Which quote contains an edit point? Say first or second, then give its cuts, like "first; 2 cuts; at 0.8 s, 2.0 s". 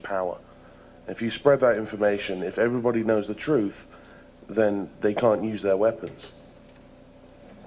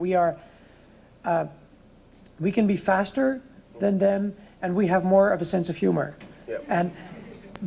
second; 1 cut; at 4.3 s